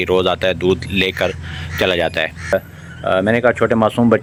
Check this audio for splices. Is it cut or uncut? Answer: uncut